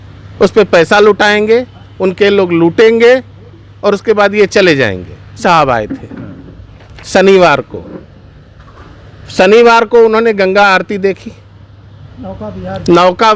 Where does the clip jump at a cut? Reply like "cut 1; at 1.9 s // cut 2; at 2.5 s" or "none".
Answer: cut 1; at 5.4 s